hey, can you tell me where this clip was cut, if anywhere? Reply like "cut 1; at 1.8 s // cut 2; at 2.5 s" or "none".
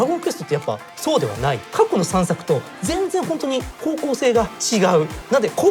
cut 1; at 1.6 s